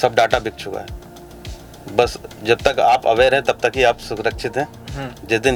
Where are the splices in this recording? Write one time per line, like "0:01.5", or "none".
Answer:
none